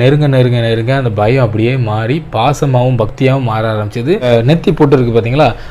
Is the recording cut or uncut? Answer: cut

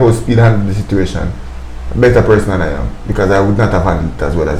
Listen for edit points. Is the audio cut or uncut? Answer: uncut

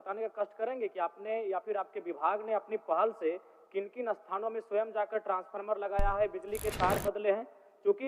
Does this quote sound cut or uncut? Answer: uncut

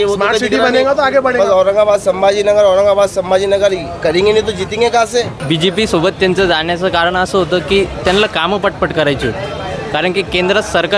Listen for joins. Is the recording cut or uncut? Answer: cut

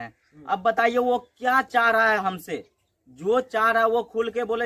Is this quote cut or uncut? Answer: uncut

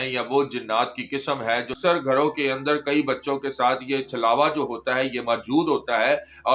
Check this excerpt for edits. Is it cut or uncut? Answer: cut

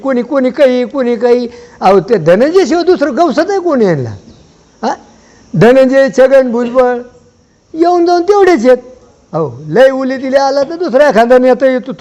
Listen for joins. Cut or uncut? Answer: uncut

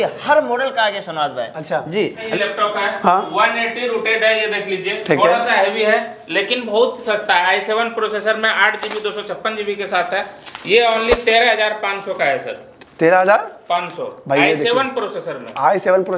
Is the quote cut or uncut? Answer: cut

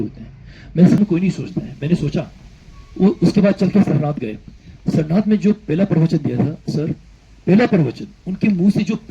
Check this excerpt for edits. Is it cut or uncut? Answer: cut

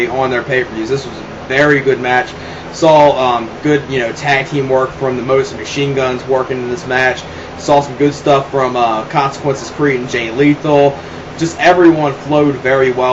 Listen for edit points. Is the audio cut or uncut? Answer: cut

